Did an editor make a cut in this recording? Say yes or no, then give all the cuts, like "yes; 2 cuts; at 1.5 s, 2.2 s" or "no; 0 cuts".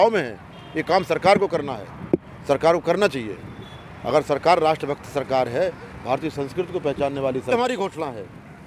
yes; 1 cut; at 7.5 s